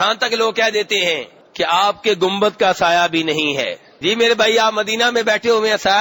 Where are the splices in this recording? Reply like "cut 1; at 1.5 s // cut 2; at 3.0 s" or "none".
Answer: cut 1; at 1.4 s // cut 2; at 3.8 s